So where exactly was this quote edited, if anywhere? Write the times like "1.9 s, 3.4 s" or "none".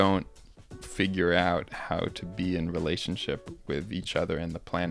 none